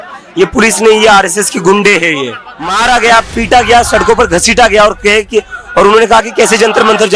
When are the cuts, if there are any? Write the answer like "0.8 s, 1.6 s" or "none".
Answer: 2.7 s